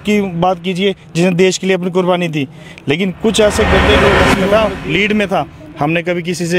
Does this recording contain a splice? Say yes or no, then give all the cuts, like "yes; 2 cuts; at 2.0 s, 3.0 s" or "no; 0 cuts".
yes; 1 cut; at 4.3 s